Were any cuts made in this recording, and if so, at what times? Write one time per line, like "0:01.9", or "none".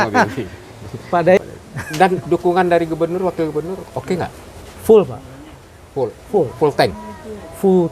0:01.4